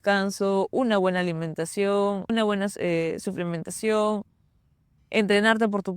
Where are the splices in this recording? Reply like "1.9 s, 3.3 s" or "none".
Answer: 2.3 s